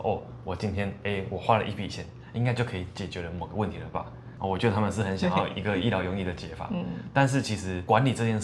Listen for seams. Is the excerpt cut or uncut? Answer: uncut